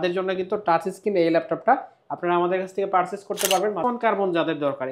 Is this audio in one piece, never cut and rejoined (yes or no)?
no